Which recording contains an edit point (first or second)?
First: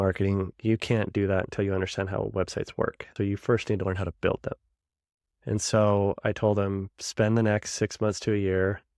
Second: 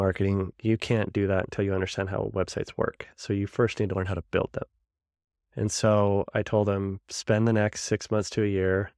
first